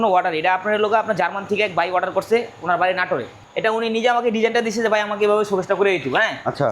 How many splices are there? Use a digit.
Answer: 1